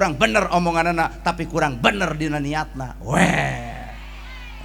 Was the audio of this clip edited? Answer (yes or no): no